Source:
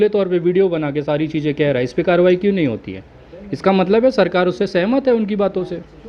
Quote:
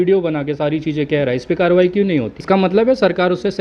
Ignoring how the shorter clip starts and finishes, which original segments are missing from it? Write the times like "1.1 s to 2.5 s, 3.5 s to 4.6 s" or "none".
2.8 s to 3.5 s